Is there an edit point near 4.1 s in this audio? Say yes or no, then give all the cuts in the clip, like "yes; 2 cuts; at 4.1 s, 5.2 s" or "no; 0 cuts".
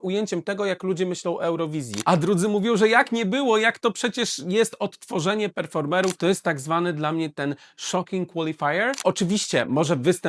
no; 3 cuts; at 1.9 s, 6.2 s, 9.0 s